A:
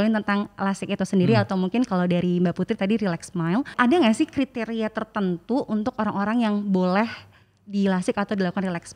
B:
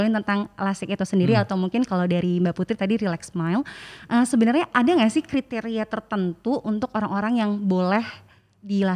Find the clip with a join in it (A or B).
A